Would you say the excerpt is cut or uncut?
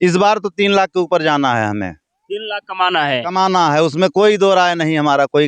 uncut